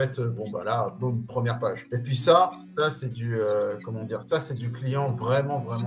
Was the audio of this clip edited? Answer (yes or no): yes